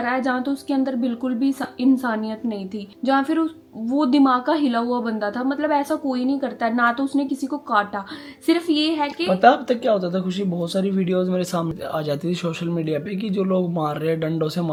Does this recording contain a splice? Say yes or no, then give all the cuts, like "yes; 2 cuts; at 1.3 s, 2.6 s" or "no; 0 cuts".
no; 0 cuts